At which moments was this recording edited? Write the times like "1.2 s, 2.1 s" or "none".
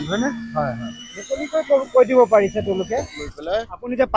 3.2 s